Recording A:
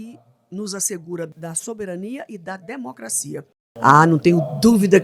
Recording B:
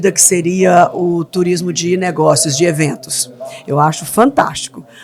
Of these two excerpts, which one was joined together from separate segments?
A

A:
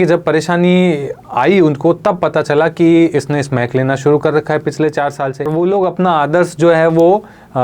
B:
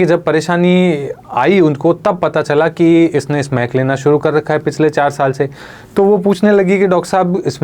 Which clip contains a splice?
A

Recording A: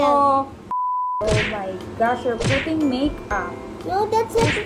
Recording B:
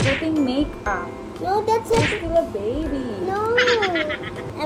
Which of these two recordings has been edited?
A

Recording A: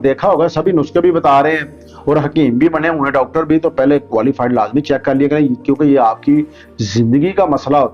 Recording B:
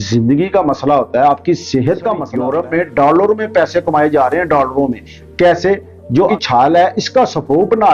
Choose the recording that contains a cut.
B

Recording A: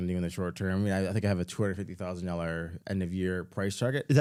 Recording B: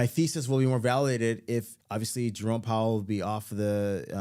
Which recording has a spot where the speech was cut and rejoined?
B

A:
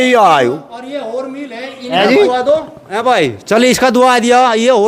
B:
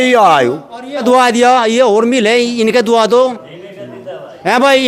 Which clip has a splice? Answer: B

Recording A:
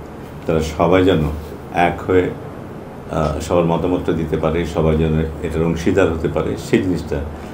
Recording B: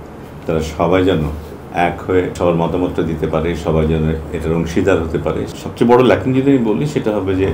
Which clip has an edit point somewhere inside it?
B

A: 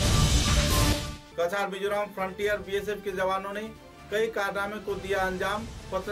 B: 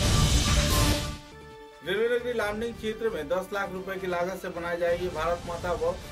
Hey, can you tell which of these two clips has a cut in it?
A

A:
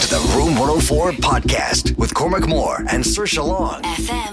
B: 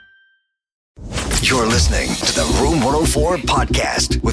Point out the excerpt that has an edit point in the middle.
B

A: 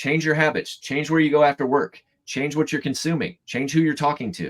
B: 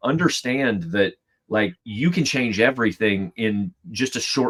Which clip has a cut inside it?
A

